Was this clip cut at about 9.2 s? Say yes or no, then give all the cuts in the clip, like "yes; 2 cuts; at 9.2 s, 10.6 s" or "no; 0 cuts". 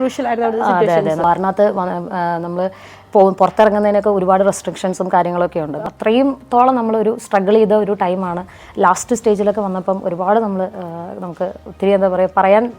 no; 2 cuts; at 1.2 s, 5.7 s